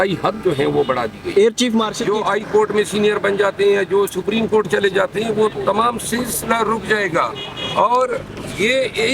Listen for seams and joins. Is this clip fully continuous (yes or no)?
no